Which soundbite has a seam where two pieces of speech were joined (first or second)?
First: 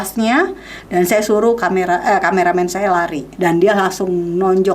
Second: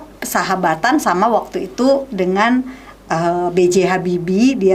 first